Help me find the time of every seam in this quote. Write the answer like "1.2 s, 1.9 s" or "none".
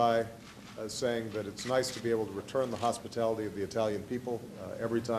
none